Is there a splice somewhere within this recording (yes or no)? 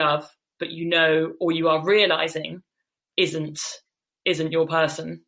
no